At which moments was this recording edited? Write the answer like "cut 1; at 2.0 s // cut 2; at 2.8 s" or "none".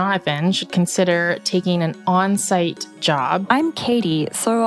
cut 1; at 3.4 s